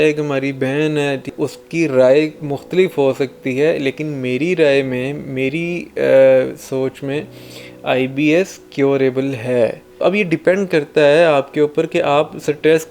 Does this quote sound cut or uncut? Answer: cut